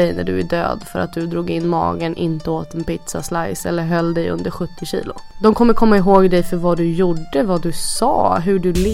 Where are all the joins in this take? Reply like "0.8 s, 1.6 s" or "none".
5.2 s